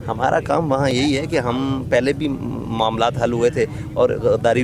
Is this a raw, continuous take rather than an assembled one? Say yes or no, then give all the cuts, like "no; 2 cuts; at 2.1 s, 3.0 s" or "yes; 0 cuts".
yes; 0 cuts